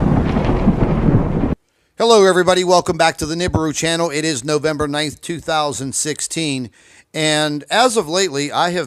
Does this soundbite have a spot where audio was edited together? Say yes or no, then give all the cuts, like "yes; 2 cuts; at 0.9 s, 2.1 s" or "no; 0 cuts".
no; 0 cuts